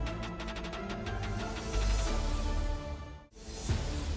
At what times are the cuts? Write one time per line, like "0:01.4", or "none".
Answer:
none